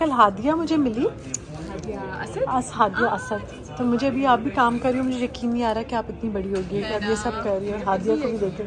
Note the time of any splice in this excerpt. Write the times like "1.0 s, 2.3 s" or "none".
none